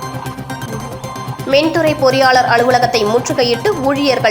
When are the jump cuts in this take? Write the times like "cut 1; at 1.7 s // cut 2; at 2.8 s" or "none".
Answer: cut 1; at 0.9 s